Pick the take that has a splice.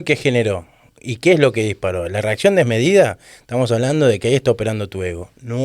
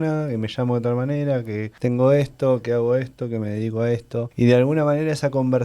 second; 2 cuts; at 1.7 s, 4.3 s

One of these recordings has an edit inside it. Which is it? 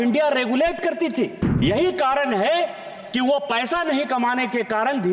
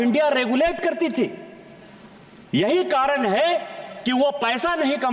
first; 1 cut; at 1.4 s

